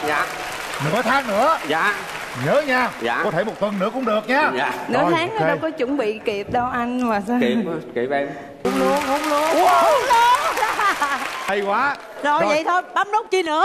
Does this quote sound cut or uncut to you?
cut